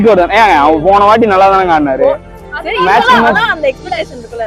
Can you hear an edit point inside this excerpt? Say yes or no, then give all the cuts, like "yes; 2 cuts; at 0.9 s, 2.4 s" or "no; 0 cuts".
no; 0 cuts